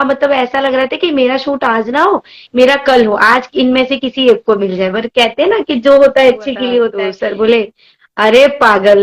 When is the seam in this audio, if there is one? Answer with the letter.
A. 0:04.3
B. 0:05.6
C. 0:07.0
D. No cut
C